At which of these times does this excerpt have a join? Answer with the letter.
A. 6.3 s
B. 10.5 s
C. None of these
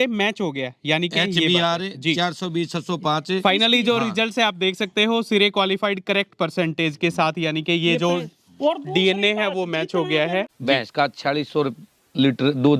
B